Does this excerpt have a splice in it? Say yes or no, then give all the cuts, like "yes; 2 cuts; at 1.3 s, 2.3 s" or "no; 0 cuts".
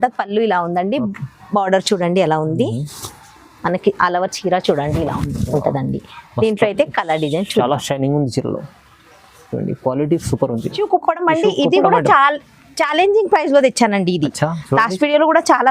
yes; 1 cut; at 10.8 s